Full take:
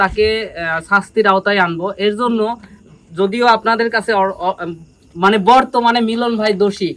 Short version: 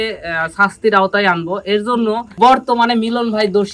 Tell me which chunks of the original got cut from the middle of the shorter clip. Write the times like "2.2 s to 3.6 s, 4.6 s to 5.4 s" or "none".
2.7 s to 5.4 s